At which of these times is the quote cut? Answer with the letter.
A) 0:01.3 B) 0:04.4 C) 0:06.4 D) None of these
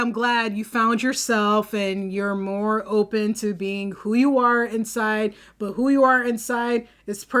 D